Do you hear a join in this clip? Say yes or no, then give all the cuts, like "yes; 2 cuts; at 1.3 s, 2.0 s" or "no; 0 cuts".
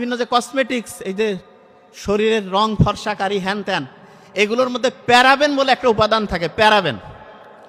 no; 0 cuts